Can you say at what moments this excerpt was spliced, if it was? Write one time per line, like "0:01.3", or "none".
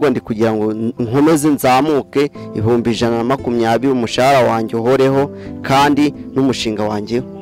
none